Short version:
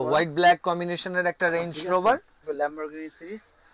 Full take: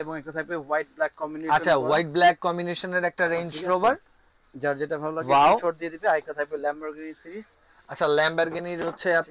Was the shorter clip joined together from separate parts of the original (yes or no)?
yes